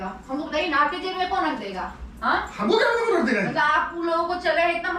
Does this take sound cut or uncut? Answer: uncut